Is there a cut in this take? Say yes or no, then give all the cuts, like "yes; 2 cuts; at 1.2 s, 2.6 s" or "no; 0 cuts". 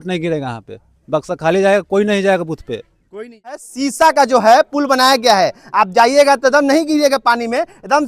yes; 1 cut; at 3.5 s